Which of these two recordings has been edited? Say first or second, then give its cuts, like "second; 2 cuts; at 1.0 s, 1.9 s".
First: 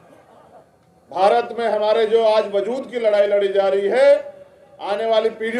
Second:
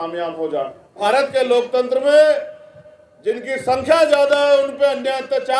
second; 1 cut; at 1.0 s